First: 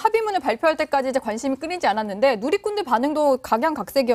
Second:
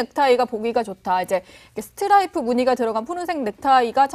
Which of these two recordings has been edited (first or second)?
first